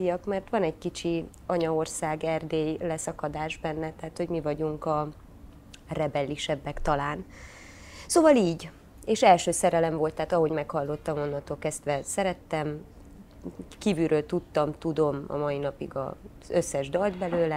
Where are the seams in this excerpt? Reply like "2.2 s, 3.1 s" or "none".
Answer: none